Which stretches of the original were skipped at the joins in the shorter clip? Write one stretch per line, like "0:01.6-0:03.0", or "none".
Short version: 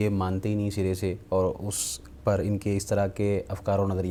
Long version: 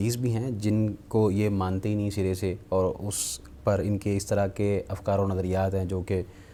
none